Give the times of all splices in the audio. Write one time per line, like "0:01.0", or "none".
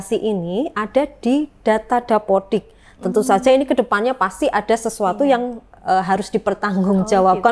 none